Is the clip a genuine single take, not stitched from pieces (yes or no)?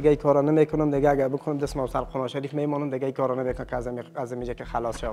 yes